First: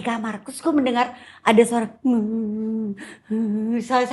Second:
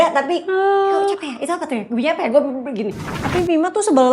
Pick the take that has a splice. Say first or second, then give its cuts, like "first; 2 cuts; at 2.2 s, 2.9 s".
second; 1 cut; at 3.1 s